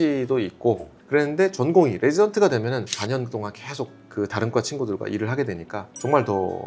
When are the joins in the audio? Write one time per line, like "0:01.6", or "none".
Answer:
0:00.9
0:02.9